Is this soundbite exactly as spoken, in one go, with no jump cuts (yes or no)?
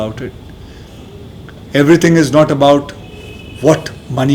yes